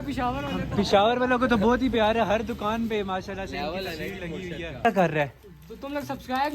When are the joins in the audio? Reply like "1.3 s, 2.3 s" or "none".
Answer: 4.8 s

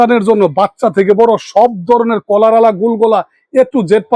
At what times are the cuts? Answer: none

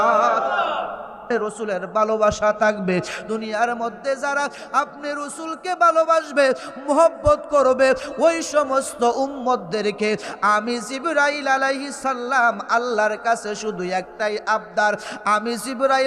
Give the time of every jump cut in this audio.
1.2 s

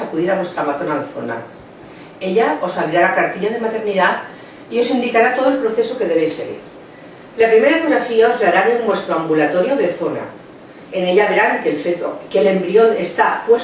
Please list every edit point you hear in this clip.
none

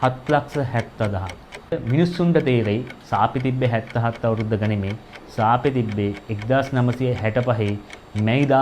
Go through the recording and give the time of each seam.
1.7 s

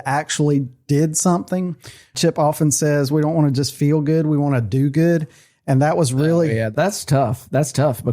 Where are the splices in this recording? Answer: 2.1 s, 6.7 s

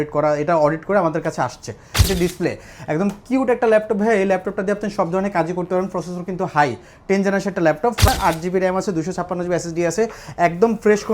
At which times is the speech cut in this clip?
2.1 s, 8.1 s

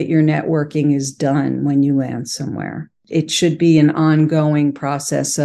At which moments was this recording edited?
2.9 s

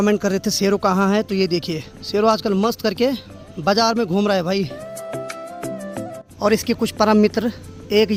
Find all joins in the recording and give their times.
none

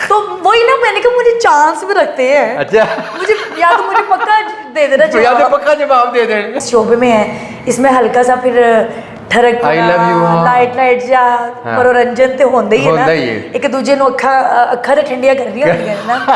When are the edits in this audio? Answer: 6.6 s

